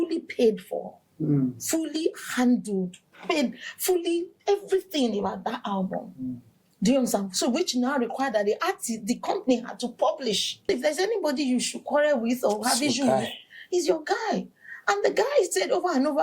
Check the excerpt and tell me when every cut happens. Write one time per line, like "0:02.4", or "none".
0:10.6